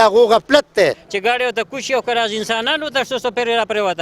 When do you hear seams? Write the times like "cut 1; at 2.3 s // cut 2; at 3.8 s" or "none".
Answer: cut 1; at 1.0 s